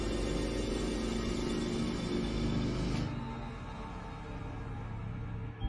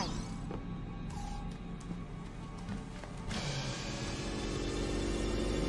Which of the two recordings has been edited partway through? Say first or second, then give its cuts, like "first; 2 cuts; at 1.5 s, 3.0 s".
second; 1 cut; at 3.8 s